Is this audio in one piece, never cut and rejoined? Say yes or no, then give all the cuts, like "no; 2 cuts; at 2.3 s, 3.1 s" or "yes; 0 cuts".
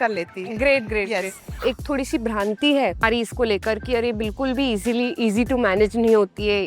no; 2 cuts; at 1.6 s, 3.0 s